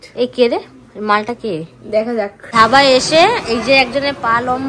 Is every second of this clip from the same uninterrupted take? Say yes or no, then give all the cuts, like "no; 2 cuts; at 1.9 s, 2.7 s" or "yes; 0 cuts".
no; 1 cut; at 2.4 s